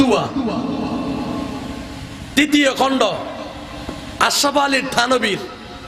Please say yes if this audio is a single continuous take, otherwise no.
yes